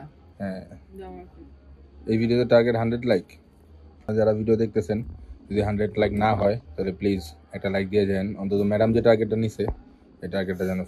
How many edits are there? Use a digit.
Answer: 1